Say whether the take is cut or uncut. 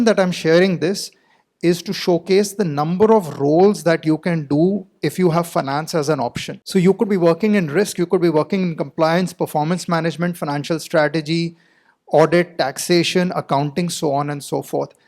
cut